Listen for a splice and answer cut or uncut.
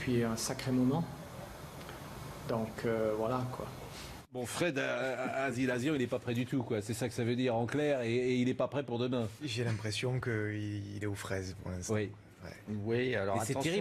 uncut